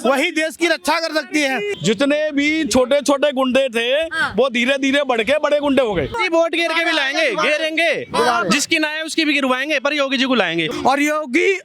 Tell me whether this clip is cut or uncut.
cut